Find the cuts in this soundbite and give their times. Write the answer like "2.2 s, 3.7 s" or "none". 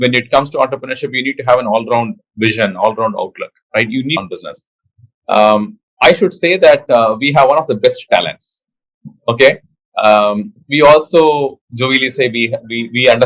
4.2 s